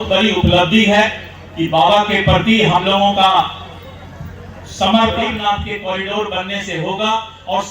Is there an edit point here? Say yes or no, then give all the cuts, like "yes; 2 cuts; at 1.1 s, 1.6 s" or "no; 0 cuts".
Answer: yes; 1 cut; at 5.3 s